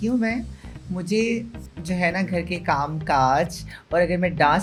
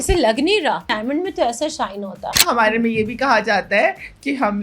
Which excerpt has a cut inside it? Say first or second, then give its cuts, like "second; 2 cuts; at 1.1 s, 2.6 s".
second; 2 cuts; at 0.9 s, 2.4 s